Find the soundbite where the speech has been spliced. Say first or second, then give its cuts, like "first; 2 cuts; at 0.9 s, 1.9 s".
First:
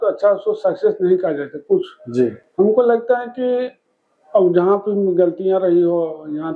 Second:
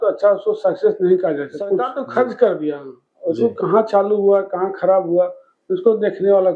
second; 1 cut; at 2.0 s